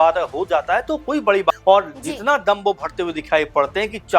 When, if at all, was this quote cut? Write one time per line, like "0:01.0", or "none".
0:01.5